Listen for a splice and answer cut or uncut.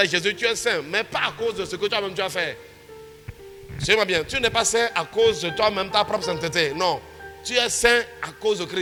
uncut